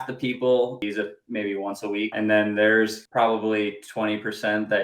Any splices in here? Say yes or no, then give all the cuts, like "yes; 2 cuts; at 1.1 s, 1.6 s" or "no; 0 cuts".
yes; 3 cuts; at 0.8 s, 2.1 s, 3.0 s